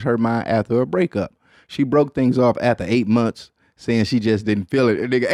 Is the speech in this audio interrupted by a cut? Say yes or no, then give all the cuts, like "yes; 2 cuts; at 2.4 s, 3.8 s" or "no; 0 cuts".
no; 0 cuts